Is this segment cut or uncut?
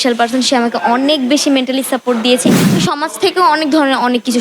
cut